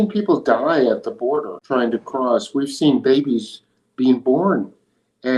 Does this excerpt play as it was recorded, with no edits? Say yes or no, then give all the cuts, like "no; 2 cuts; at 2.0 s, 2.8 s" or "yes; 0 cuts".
no; 1 cut; at 1.6 s